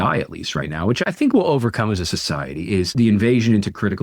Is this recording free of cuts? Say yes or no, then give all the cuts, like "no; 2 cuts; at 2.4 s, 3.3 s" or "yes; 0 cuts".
no; 1 cut; at 2.9 s